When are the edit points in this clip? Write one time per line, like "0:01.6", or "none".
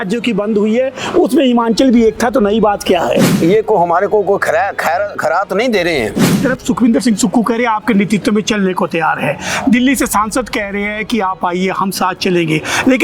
0:03.3
0:06.4

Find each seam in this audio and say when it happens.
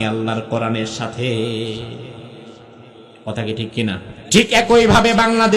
0:04.1

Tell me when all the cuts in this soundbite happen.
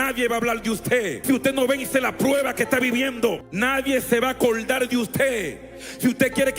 0:01.2
0:03.5

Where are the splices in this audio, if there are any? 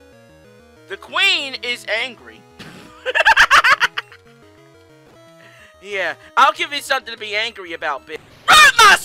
0:08.1

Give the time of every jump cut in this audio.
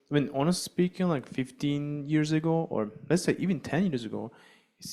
none

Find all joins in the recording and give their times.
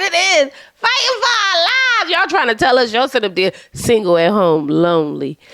none

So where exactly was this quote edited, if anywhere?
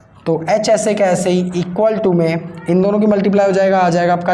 none

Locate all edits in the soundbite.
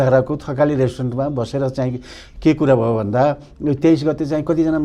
none

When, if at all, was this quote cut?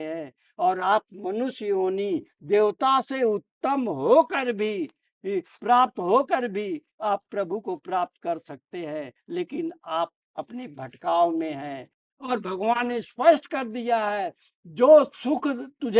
0:12.3

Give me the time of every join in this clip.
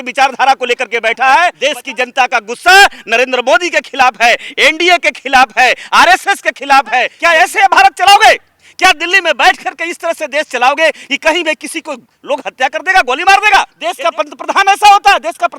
0:01.6
0:07.1
0:13.8

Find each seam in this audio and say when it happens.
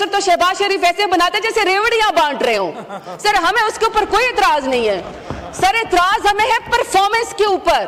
none

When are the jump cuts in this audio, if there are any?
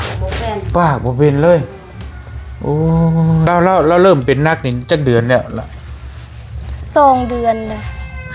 0:03.5

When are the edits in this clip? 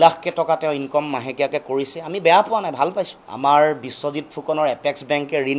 0:03.2

